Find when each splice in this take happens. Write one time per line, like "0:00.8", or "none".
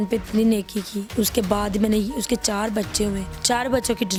none